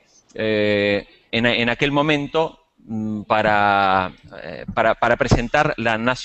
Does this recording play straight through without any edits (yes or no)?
yes